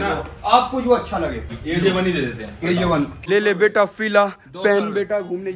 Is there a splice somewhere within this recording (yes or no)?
yes